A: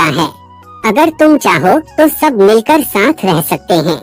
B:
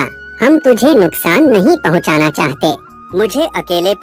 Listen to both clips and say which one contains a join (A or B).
B